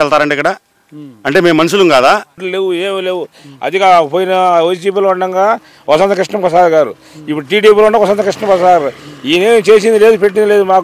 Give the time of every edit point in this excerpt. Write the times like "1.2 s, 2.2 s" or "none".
2.3 s